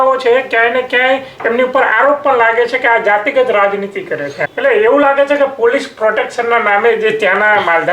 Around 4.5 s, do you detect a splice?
yes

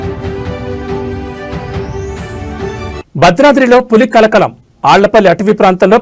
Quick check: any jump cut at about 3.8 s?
no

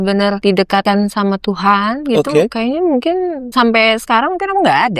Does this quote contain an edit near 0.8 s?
yes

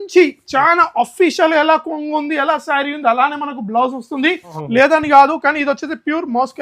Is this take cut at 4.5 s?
yes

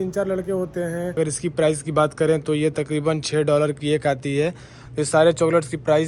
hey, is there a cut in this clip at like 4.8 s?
yes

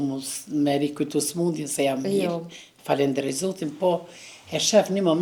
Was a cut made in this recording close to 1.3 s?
no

